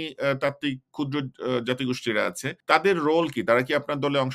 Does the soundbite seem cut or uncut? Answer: cut